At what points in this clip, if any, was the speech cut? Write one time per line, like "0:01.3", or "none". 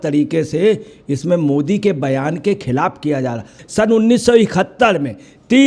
0:03.6